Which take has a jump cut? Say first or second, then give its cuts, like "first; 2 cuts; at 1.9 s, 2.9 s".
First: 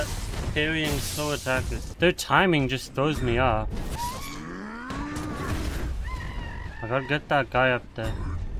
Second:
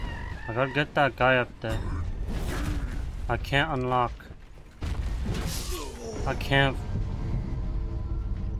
first; 2 cuts; at 1.8 s, 3.9 s